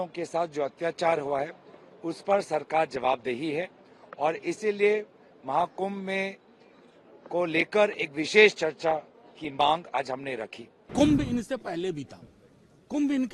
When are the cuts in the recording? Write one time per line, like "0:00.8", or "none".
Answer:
0:10.9

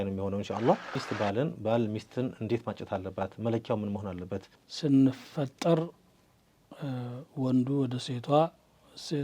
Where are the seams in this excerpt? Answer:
0:01.0
0:04.6

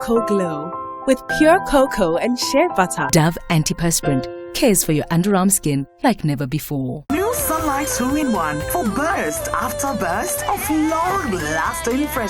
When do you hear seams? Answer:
0:03.0
0:07.1

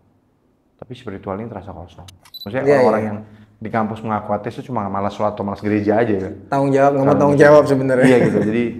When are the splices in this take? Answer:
0:02.4

